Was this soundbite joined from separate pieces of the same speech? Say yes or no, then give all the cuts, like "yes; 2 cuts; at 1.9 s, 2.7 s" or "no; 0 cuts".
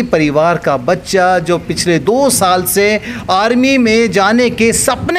no; 0 cuts